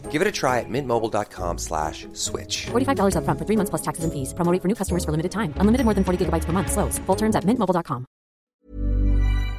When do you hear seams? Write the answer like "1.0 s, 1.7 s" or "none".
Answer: 8.5 s